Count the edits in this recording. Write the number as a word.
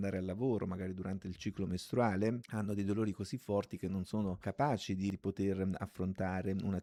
zero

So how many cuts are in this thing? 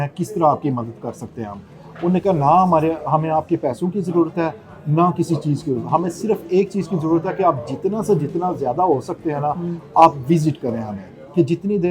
zero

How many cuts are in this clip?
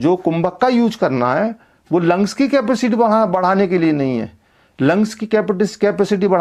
zero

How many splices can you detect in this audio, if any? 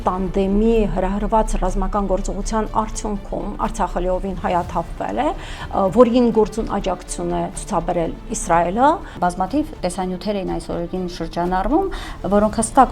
one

